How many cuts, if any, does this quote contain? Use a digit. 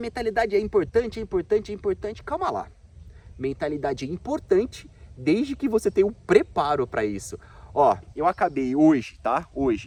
0